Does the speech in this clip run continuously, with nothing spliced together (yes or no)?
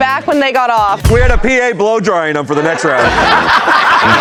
yes